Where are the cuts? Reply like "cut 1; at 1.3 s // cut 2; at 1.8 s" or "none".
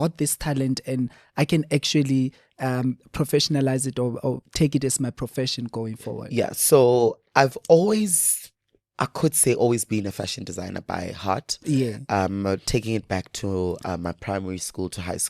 none